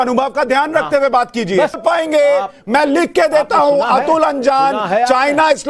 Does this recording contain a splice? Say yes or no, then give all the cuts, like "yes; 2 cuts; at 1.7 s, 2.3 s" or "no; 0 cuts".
yes; 1 cut; at 1.8 s